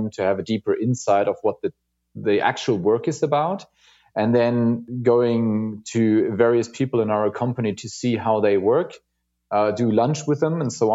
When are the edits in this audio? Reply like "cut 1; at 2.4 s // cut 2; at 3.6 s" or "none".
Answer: cut 1; at 4.8 s